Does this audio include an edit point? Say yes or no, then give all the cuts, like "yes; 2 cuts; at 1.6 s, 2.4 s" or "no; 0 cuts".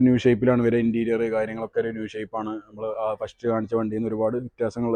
no; 0 cuts